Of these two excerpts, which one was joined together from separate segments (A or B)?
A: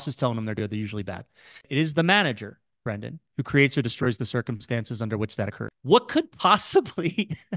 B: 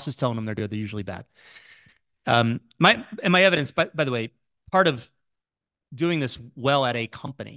A